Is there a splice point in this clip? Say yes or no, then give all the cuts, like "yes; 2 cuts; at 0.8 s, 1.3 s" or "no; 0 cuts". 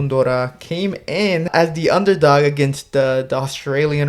yes; 1 cut; at 1.5 s